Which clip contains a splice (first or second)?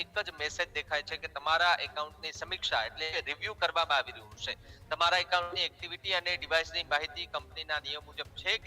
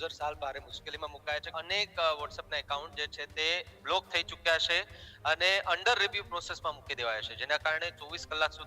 second